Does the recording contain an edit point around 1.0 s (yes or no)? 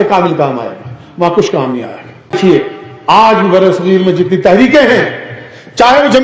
no